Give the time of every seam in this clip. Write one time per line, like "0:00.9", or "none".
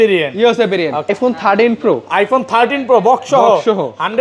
0:01.1